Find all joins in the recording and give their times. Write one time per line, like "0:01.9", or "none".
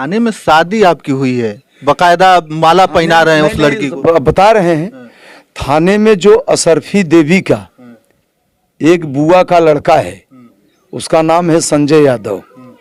none